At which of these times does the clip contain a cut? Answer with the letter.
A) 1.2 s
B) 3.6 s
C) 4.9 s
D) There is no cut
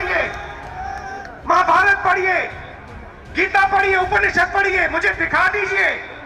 A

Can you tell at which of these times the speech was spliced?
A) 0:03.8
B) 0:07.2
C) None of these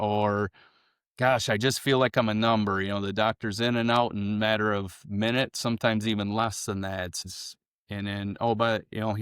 B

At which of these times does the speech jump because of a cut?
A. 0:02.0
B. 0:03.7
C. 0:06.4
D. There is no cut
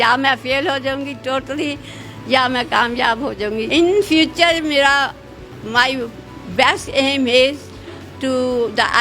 B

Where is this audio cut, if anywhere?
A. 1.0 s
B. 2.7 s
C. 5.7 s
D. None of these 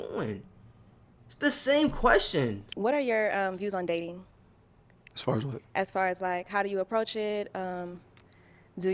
B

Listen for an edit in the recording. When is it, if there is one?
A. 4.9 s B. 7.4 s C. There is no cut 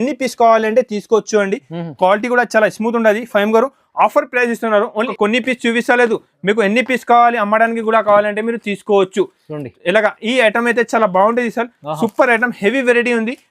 A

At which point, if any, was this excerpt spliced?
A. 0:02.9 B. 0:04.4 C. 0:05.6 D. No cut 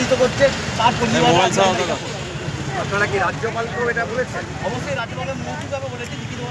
B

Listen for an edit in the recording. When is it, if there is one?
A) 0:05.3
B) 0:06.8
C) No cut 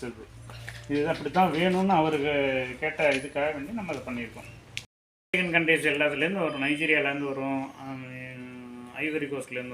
A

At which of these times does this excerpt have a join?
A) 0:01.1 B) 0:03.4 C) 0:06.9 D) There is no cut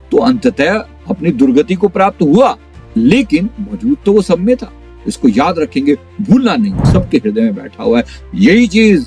C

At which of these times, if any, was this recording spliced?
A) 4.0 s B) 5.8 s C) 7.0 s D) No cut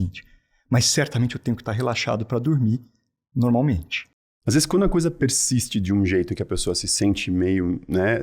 A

